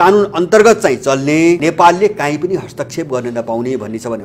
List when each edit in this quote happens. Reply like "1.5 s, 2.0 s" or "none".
1.6 s

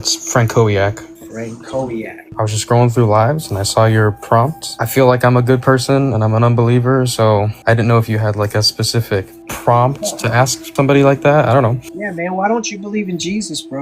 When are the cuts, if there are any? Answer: 2.3 s, 4.7 s

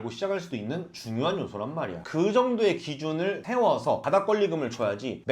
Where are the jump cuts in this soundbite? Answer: 2.0 s, 3.6 s

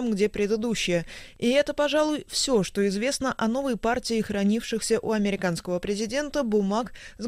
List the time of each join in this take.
2.9 s

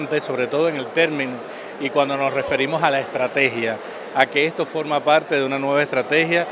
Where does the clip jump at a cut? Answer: 1.6 s

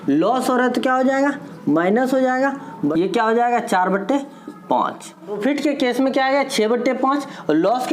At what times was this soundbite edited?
2.9 s, 5.4 s

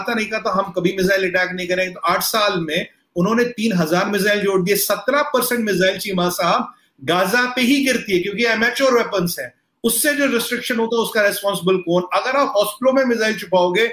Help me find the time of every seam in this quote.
none

